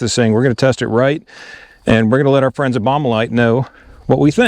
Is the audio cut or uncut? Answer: uncut